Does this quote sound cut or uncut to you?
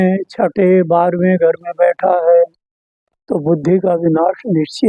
uncut